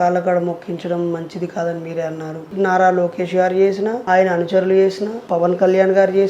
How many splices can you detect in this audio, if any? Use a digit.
3